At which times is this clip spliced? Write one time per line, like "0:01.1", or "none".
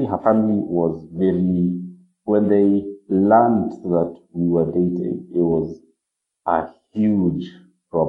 none